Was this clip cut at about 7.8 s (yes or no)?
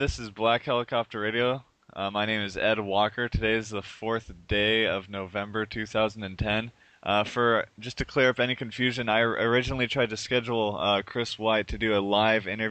no